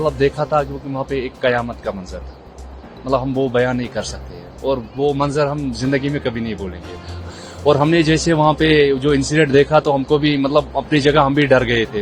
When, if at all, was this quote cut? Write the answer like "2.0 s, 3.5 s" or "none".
7.2 s